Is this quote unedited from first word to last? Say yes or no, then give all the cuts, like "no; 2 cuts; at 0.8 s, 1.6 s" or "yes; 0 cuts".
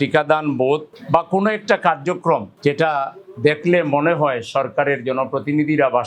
yes; 0 cuts